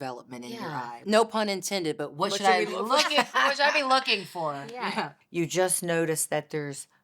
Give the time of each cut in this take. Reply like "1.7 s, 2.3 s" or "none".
1.0 s, 5.2 s